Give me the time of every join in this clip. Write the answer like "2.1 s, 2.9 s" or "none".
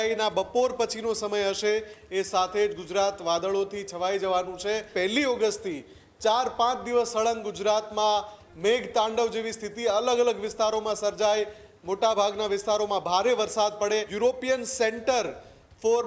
4.9 s, 14.1 s